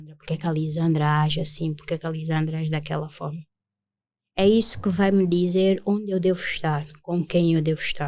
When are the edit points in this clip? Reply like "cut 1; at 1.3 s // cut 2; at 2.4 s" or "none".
none